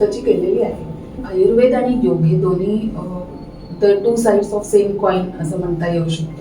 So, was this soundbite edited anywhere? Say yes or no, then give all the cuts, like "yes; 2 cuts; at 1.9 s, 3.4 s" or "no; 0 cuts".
yes; 1 cut; at 1.2 s